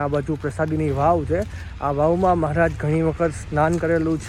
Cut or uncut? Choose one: uncut